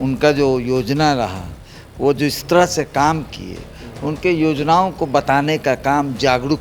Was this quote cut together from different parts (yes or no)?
no